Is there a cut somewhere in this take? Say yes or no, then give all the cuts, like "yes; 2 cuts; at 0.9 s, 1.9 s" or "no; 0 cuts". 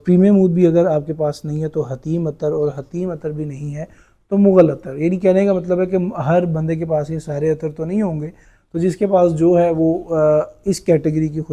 no; 0 cuts